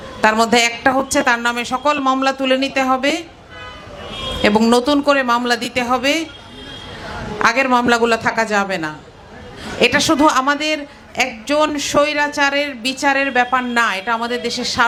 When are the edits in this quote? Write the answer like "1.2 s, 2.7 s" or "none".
none